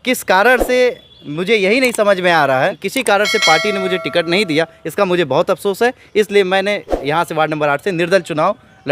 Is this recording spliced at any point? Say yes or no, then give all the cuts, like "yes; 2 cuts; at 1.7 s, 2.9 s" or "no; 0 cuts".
yes; 1 cut; at 2.8 s